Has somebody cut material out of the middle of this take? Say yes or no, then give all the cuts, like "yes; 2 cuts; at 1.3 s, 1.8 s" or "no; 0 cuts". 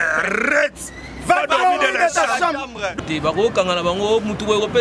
yes; 1 cut; at 3.0 s